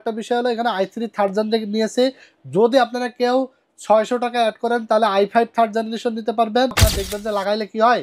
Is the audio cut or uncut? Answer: cut